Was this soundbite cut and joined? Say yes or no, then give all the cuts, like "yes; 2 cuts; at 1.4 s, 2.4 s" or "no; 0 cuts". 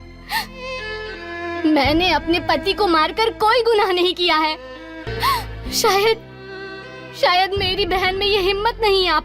yes; 1 cut; at 5.1 s